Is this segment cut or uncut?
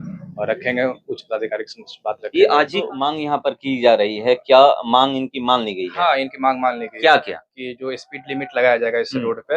cut